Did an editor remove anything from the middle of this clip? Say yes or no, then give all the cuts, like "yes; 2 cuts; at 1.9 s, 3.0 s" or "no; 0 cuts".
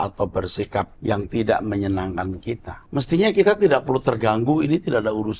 yes; 2 cuts; at 0.9 s, 2.7 s